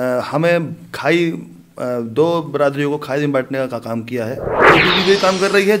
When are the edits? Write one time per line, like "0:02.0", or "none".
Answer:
0:04.7